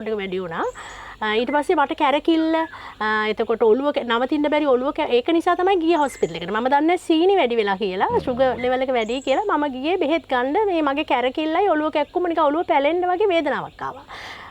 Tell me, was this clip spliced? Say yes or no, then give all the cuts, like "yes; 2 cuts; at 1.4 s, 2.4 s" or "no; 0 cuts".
no; 0 cuts